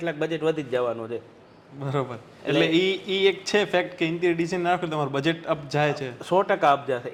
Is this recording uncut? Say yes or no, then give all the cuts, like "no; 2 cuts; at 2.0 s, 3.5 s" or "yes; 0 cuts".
yes; 0 cuts